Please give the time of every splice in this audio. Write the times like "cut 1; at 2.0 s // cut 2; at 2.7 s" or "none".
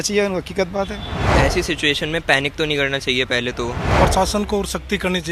cut 1; at 1.3 s // cut 2; at 4.0 s